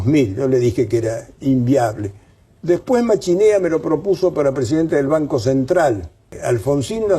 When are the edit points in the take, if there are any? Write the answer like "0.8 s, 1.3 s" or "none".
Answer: 6.3 s